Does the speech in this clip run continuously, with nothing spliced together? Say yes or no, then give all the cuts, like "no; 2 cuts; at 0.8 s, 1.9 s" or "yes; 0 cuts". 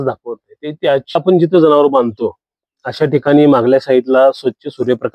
no; 1 cut; at 1.2 s